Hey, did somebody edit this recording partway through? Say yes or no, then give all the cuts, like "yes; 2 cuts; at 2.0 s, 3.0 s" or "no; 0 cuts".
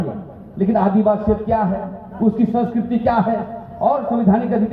no; 0 cuts